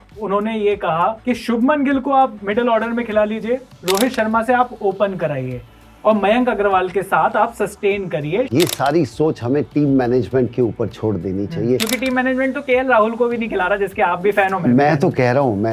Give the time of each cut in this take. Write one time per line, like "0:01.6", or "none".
0:01.2
0:08.5